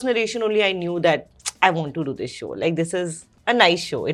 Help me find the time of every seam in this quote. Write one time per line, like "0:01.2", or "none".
none